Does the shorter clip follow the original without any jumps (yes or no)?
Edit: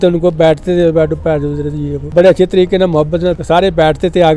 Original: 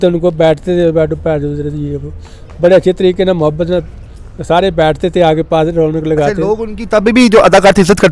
no